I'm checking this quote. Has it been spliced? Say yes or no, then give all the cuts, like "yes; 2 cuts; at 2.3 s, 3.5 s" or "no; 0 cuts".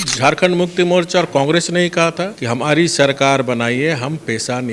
yes; 1 cut; at 2.3 s